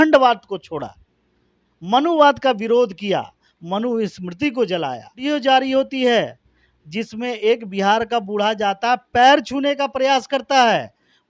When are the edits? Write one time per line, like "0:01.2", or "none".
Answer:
0:05.2